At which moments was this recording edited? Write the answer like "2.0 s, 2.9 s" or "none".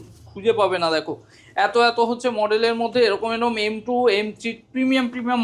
none